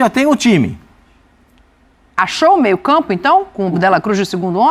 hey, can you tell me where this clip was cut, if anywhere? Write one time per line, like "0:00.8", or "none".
none